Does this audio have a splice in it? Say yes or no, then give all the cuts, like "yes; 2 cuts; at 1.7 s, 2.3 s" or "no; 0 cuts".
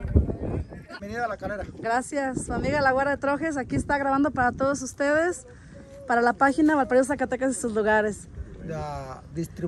yes; 1 cut; at 1.0 s